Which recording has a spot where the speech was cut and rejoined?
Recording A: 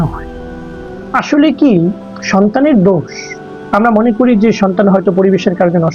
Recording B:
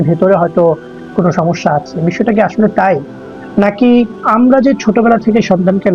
B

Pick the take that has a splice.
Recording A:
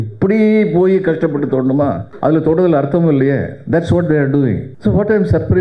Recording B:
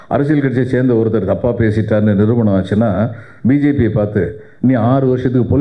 A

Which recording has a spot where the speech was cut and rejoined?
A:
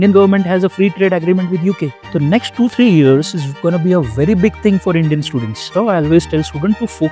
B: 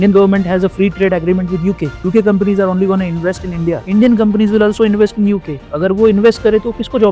A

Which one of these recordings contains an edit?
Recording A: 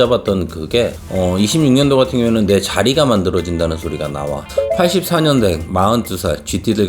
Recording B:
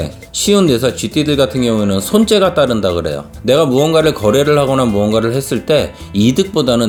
A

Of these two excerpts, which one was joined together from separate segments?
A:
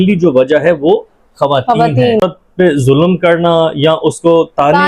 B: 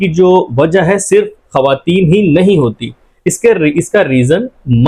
A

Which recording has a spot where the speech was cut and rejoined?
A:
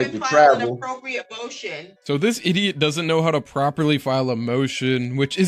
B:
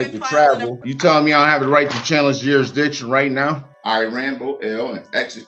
B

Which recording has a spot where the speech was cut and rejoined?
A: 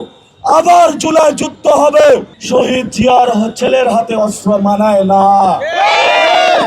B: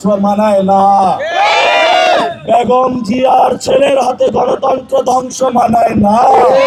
A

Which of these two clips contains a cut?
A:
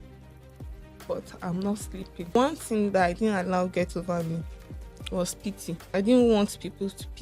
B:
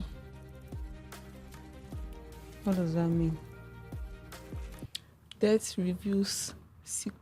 A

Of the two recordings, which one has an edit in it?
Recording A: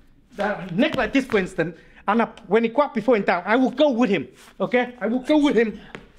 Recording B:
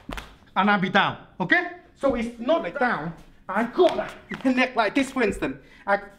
B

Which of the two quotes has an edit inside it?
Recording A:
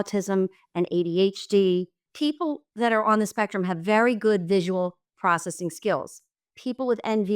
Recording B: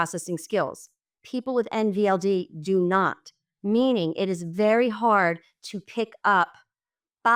A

